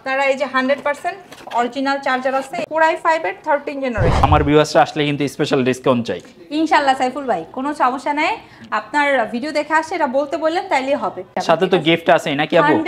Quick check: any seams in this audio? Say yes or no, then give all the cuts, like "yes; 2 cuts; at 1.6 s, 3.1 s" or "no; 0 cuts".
yes; 3 cuts; at 2.7 s, 4.2 s, 11.4 s